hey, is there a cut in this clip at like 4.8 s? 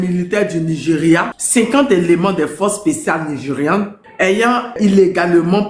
yes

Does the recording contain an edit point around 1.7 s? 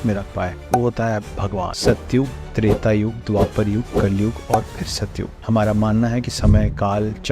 yes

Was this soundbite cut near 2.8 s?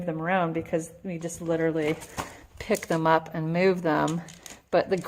no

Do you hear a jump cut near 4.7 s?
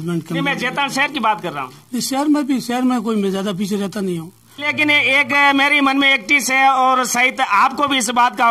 yes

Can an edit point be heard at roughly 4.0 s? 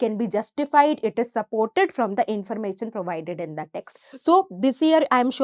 yes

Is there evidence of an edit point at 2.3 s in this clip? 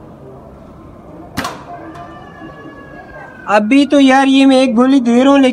yes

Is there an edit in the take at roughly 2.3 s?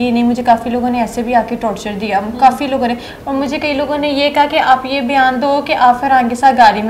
no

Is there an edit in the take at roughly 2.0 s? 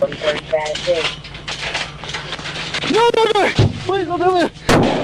no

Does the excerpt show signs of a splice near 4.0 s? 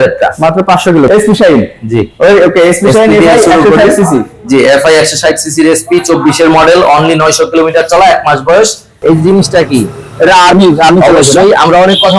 no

